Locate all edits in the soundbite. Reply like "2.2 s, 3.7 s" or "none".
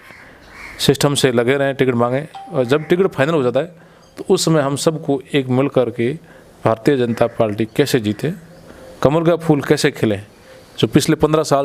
none